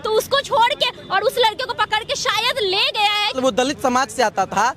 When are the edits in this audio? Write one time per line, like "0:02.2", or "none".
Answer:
0:03.3